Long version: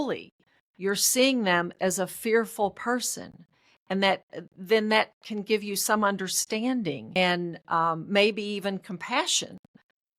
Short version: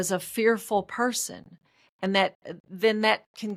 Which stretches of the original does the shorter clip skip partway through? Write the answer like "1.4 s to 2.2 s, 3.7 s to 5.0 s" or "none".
none